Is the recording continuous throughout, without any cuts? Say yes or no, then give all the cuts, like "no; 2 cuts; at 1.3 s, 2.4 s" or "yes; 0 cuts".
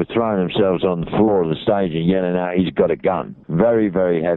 no; 1 cut; at 3.4 s